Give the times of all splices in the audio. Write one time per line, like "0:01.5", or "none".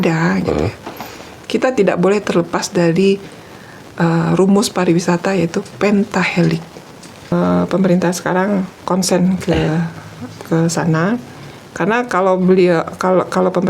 0:07.3